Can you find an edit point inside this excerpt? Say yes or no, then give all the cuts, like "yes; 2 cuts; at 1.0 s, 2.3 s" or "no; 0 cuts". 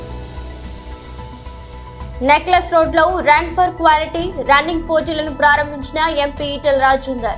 no; 0 cuts